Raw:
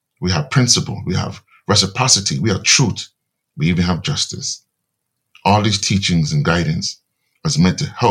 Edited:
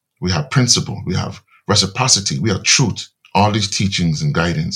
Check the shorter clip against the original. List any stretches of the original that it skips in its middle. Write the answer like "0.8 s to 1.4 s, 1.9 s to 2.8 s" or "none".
3.1 s to 5.2 s